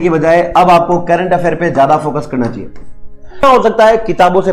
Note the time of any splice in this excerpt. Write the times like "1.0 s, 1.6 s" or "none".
3.4 s

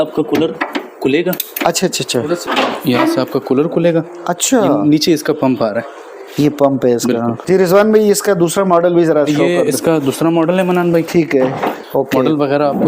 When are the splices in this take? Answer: 7.4 s, 11.8 s

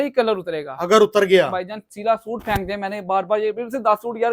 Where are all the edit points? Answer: none

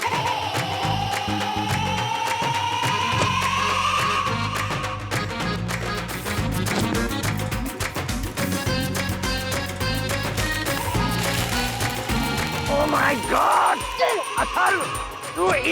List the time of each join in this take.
6.2 s

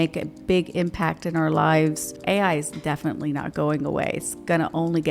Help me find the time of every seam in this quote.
2.2 s

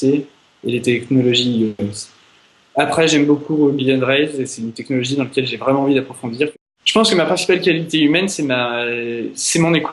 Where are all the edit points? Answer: 6.6 s

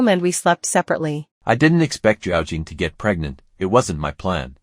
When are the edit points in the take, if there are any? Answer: 1.2 s

